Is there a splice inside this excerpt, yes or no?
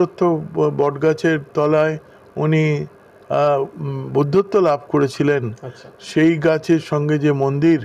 no